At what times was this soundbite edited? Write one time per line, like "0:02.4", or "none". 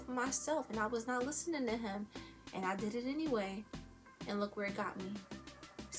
none